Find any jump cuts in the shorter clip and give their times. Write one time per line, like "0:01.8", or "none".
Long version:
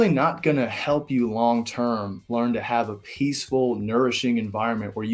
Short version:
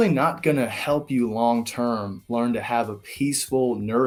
none